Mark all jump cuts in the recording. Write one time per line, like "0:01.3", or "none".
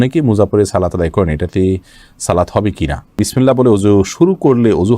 0:03.1